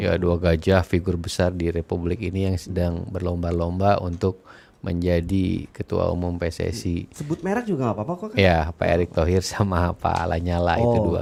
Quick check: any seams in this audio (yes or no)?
no